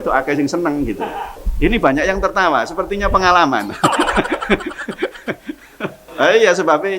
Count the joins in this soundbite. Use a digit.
2